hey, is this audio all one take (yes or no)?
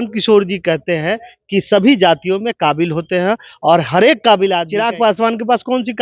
no